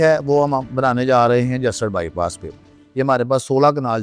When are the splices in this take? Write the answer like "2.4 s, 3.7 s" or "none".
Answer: none